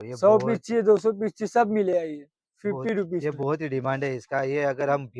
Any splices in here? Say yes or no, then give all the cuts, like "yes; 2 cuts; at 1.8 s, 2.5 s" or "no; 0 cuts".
no; 0 cuts